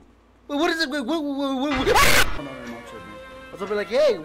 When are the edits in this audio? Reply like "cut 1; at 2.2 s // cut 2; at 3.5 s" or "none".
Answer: cut 1; at 2.4 s